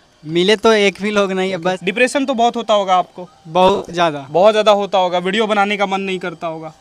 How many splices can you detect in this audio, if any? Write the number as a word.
one